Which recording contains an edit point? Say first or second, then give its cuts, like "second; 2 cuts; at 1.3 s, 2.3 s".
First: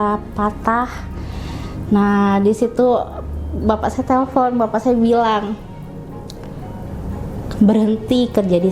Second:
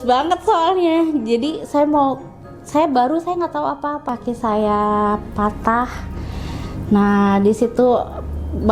second; 1 cut; at 4.0 s